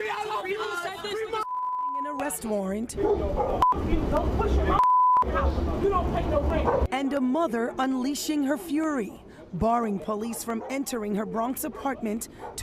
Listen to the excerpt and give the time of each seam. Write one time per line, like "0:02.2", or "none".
0:02.2